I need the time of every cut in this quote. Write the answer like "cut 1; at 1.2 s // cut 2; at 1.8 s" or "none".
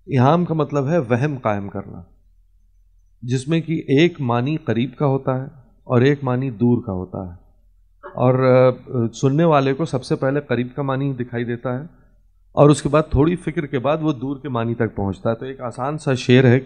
none